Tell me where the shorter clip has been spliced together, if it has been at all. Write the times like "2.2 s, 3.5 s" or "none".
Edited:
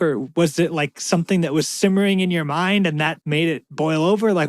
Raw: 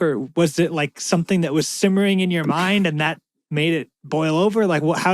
3.5 s

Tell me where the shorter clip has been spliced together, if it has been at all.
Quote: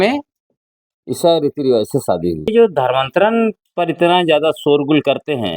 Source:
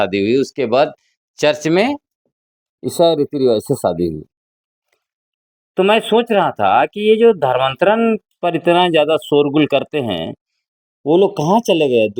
2.5 s

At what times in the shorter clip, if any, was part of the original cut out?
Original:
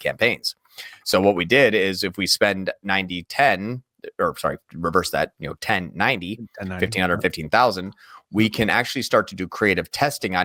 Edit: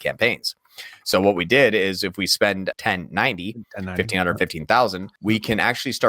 2.8 s, 5.1 s

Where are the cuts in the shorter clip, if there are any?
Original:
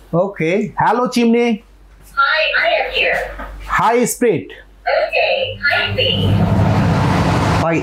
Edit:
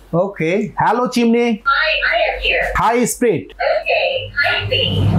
1.7 s, 2.7 s, 3.5 s

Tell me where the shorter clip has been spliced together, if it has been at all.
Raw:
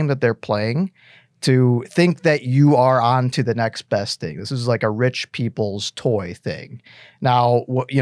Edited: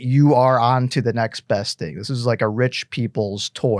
none

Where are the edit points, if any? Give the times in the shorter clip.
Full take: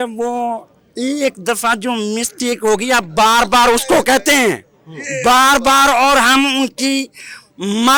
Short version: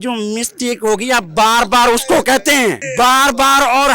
2.8 s

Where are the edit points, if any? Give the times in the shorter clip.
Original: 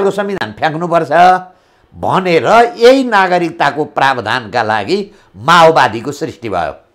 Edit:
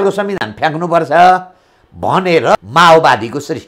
2.5 s

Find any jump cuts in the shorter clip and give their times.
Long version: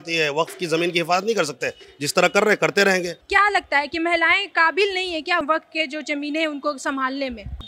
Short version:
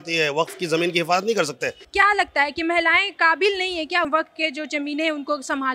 1.8 s

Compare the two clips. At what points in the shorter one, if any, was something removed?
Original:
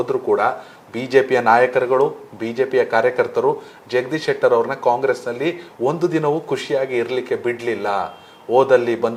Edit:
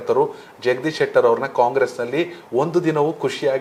none

